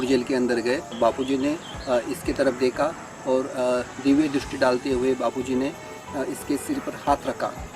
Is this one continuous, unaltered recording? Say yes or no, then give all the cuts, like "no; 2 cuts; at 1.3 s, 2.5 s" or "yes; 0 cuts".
no; 1 cut; at 0.9 s